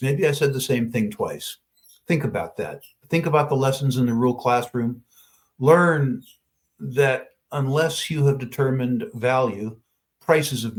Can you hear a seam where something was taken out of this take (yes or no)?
no